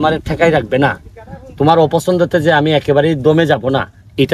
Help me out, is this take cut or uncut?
uncut